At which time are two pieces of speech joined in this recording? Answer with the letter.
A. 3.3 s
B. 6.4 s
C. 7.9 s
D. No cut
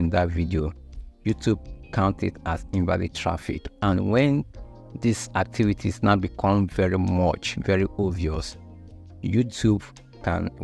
D